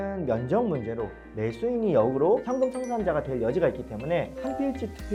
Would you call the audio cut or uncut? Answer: uncut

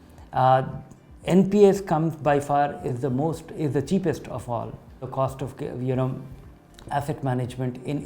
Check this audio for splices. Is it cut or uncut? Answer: uncut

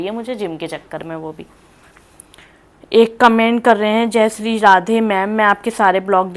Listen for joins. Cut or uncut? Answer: uncut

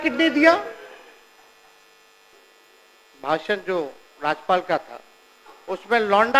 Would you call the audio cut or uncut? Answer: cut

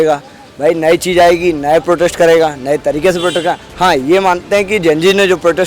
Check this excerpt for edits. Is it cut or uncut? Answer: uncut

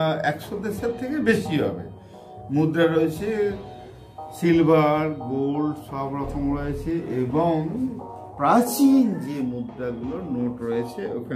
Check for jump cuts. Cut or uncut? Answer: uncut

